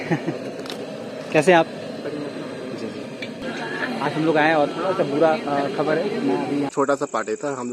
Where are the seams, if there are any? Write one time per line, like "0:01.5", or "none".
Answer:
0:03.4
0:06.7